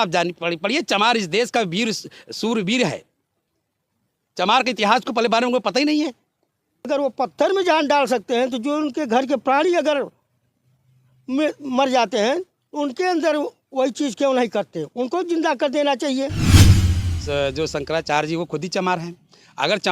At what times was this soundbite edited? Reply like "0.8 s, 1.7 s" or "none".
6.9 s, 16.7 s